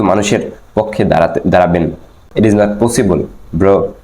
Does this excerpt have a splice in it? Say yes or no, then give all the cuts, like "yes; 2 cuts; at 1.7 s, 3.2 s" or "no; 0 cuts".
yes; 1 cut; at 2.2 s